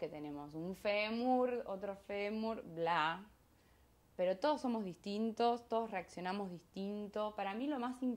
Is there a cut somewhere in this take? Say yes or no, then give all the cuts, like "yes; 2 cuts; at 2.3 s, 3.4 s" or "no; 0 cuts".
no; 0 cuts